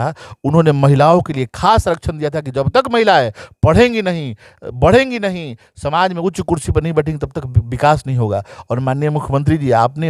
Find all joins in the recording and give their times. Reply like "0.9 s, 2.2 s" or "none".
none